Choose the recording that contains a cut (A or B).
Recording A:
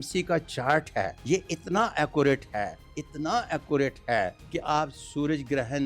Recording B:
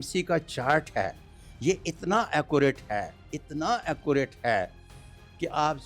A